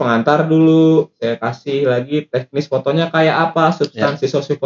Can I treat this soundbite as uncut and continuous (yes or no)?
yes